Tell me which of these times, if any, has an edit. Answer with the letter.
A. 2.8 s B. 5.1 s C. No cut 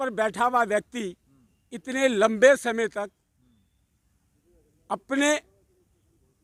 C